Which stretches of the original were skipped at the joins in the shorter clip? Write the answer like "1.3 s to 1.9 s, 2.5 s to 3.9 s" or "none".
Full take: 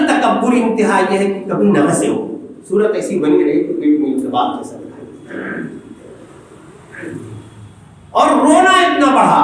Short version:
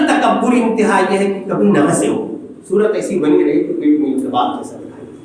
none